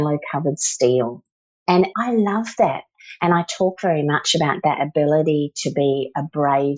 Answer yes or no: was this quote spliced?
yes